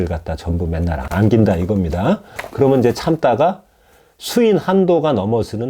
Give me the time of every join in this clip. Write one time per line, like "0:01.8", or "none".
0:01.0